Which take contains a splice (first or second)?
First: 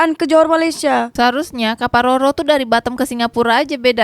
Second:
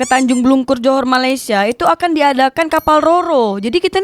first